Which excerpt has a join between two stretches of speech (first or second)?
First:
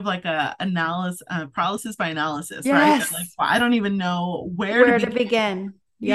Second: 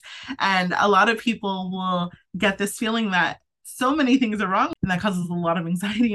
second